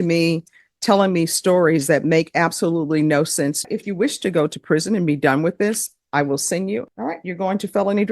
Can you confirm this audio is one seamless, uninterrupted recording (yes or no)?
no